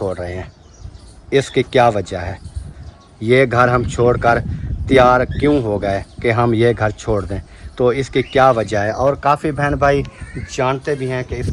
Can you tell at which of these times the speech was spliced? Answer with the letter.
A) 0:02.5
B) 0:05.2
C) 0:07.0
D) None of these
D